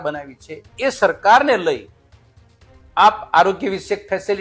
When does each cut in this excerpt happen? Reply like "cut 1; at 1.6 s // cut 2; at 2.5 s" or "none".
none